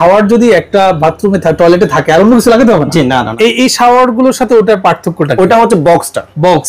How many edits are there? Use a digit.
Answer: 1